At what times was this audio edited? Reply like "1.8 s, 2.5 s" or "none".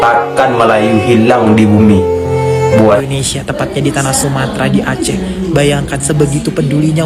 3.1 s